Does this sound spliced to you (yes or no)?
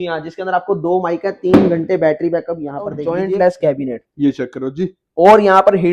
yes